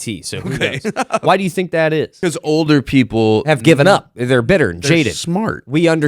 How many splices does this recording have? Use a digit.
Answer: 2